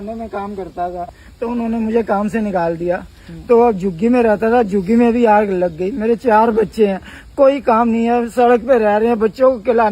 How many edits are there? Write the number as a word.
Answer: one